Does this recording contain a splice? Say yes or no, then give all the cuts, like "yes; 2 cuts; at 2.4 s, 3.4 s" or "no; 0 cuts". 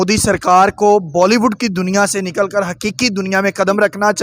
no; 0 cuts